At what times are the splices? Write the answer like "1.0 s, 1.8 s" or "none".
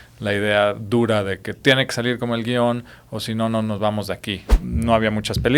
4.6 s